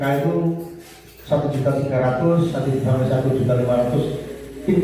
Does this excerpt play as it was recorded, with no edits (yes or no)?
yes